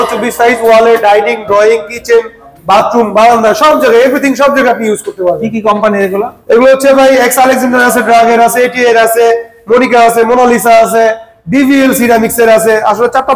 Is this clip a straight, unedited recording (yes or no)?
yes